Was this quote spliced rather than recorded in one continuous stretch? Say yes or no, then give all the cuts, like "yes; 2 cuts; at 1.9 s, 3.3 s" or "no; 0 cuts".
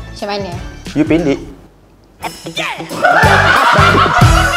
no; 0 cuts